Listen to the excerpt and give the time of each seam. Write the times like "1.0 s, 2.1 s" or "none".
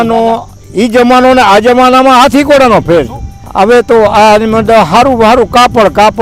none